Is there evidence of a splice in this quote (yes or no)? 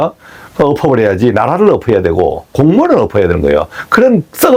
no